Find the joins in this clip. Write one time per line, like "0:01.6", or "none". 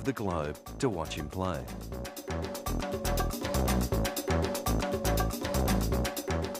0:05.1